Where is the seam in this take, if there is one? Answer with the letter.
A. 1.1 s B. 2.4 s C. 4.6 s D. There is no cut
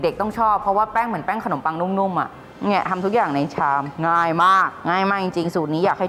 B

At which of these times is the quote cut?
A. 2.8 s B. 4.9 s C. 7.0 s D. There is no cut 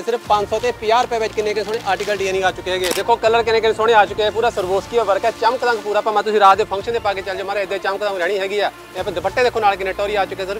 A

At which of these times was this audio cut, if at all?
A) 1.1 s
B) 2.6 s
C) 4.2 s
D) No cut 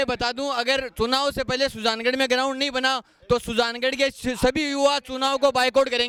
D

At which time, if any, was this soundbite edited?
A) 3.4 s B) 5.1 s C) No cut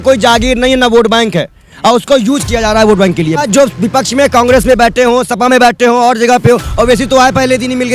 A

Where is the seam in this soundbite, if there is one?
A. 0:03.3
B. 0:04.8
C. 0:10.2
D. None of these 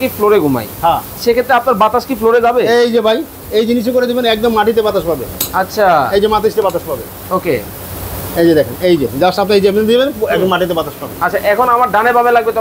D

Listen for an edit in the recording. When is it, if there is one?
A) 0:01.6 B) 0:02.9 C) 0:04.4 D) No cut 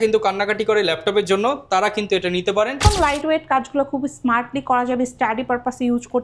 B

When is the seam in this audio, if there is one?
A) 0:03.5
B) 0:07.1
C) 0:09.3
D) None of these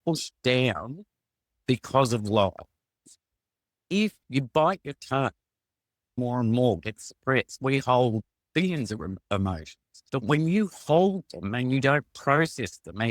A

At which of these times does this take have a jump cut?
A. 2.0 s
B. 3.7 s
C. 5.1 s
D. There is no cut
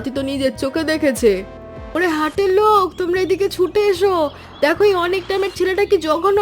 A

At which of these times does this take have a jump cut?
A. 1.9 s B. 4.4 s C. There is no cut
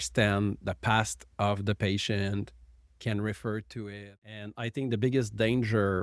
B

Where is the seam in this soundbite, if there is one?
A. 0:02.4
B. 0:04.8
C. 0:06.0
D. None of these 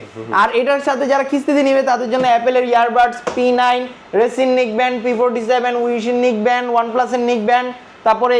D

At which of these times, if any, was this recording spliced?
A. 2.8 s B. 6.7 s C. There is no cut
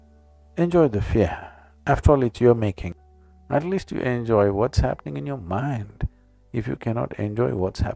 A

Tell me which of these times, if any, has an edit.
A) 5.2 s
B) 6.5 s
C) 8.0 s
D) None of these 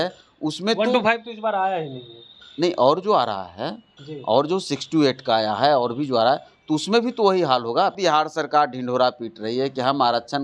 C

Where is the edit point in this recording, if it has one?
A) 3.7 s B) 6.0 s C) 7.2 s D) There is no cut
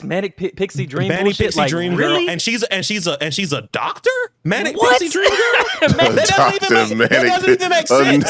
B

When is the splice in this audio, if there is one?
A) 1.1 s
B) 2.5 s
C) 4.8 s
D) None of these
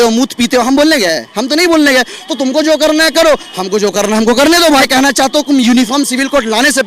C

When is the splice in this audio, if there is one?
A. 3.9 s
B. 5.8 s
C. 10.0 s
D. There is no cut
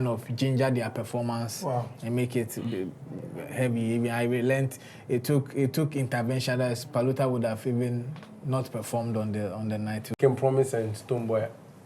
C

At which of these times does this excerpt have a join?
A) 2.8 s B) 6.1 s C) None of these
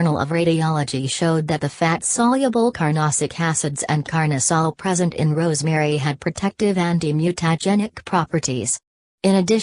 A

